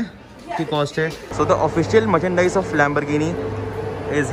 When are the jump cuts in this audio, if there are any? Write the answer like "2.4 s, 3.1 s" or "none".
1.2 s